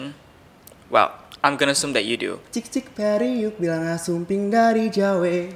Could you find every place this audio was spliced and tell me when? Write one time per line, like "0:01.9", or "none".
0:02.4